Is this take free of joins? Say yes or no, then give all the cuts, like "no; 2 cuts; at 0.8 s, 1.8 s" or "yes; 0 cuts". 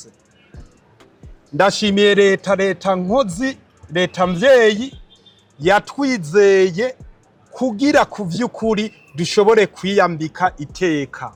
yes; 0 cuts